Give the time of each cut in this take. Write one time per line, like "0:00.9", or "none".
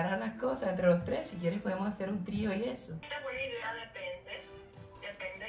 0:03.1